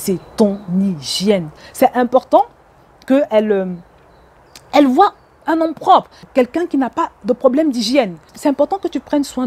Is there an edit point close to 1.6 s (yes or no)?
yes